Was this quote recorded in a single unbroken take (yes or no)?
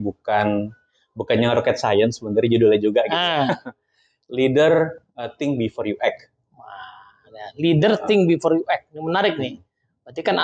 yes